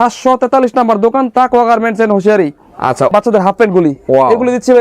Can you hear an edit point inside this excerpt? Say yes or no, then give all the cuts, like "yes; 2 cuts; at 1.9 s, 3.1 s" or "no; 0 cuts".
yes; 1 cut; at 3.1 s